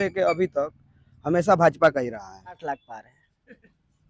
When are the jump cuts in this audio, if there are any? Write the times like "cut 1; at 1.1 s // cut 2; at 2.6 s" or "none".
cut 1; at 2.6 s